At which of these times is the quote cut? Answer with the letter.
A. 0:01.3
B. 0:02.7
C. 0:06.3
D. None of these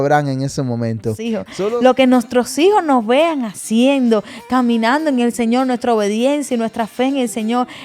A